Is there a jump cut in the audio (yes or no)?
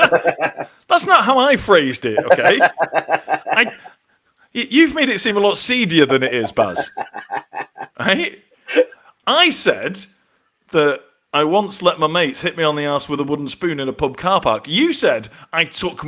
no